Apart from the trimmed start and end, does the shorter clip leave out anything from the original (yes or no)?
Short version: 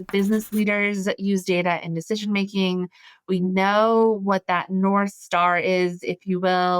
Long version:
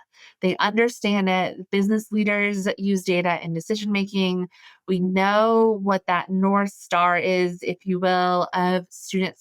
no